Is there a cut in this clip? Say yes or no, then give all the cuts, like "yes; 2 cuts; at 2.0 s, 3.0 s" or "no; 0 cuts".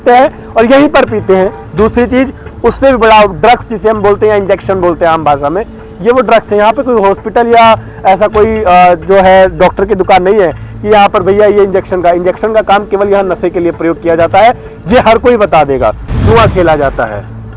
yes; 1 cut; at 16.1 s